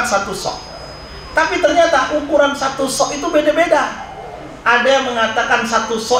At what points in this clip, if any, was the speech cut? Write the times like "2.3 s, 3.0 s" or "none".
none